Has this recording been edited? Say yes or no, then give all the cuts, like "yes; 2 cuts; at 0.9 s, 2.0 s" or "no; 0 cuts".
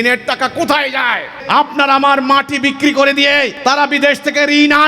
yes; 2 cuts; at 1.3 s, 3.5 s